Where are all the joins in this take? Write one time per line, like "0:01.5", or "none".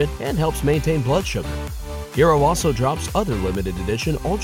none